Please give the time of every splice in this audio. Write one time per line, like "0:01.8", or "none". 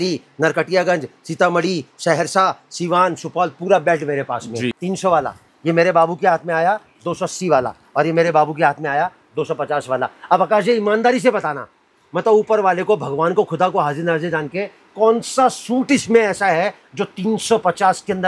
0:04.7